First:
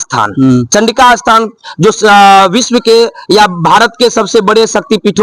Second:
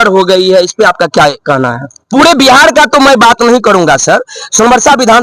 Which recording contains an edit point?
second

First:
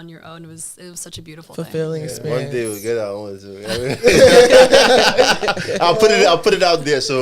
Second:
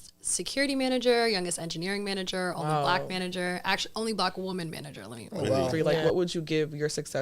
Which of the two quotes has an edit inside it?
second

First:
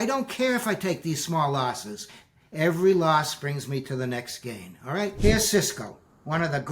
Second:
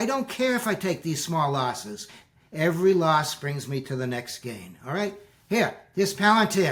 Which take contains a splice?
first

